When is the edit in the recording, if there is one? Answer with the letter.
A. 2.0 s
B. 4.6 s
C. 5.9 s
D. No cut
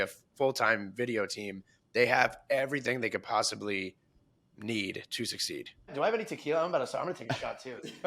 C